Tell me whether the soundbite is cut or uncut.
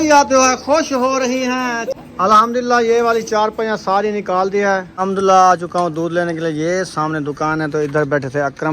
cut